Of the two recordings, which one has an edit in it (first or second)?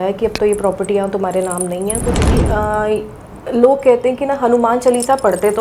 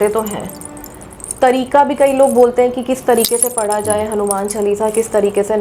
first